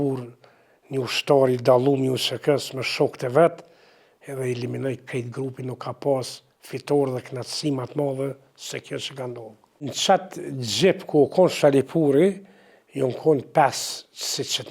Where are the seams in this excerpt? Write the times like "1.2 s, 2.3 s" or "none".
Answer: 9.9 s